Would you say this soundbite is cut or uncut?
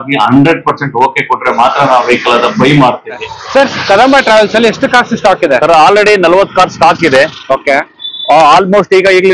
cut